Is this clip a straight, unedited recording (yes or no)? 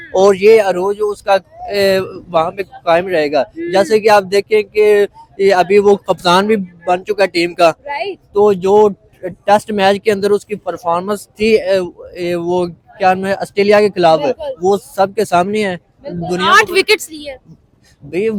yes